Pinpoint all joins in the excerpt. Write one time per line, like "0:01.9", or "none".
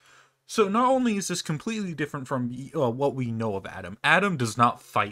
none